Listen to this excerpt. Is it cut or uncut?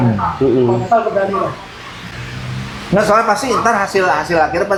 uncut